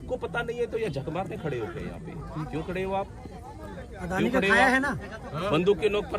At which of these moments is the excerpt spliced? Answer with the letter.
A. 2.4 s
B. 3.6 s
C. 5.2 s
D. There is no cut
D